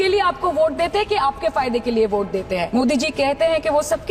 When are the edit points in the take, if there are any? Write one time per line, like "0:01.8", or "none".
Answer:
0:02.7